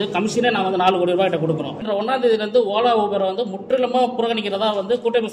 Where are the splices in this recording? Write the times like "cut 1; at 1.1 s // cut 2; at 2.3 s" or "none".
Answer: cut 1; at 1.8 s

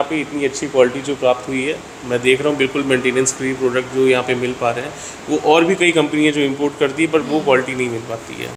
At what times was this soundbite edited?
none

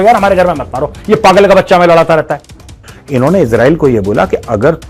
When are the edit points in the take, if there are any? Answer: cut 1; at 2.9 s

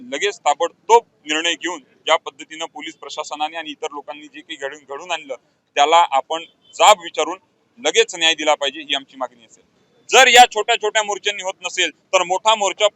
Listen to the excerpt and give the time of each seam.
cut 1; at 9.8 s

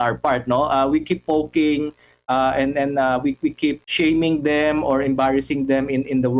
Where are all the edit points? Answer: cut 1; at 3.8 s

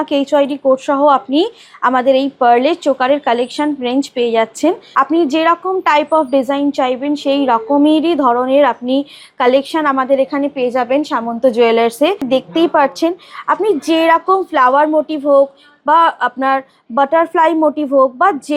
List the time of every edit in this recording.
cut 1; at 4.8 s // cut 2; at 12.2 s

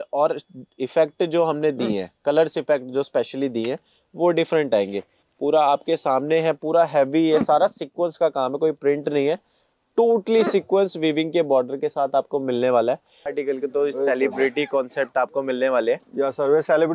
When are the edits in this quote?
cut 1; at 13.3 s

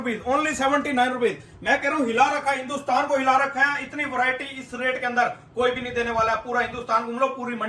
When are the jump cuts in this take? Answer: none

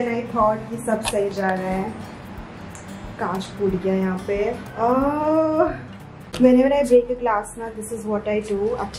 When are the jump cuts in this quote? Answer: none

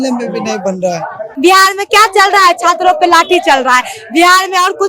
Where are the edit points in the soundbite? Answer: cut 1; at 1.2 s

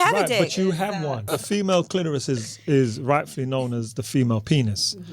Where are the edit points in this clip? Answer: cut 1; at 1.3 s

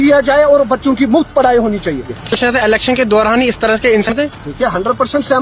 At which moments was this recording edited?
none

